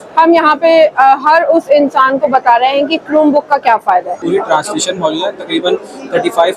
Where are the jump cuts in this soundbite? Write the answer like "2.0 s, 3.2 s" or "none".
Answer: 4.2 s